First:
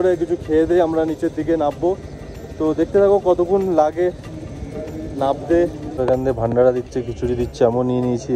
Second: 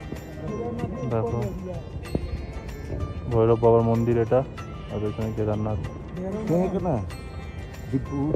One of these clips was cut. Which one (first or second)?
first